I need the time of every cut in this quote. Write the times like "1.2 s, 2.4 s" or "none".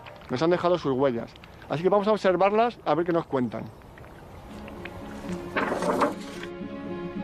4.1 s